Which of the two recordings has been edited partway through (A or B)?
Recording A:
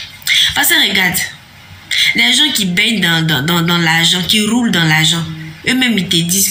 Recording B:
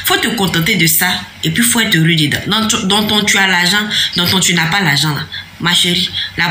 B